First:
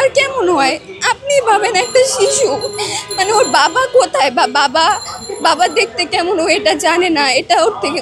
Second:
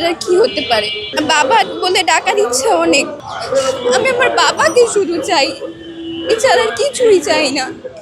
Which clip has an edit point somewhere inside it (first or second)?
second